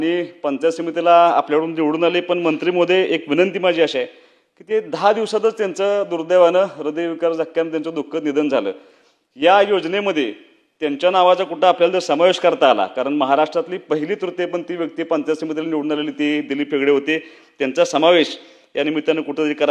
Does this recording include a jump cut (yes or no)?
no